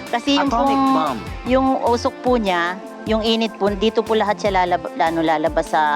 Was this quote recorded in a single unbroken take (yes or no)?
yes